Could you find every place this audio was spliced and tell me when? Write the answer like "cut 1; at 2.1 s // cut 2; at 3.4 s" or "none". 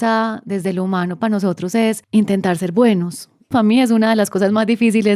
cut 1; at 2.0 s // cut 2; at 3.5 s